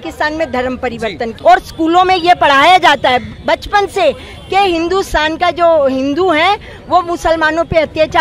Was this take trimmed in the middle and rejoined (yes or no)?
yes